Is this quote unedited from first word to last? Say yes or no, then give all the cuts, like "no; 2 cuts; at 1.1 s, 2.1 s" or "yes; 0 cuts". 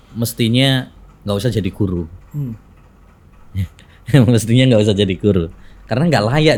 yes; 0 cuts